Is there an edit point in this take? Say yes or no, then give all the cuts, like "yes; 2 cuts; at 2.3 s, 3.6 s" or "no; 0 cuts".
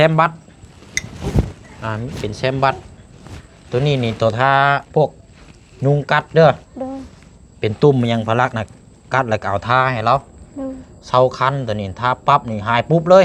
no; 0 cuts